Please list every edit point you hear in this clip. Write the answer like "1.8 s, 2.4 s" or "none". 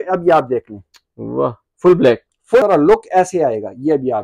2.6 s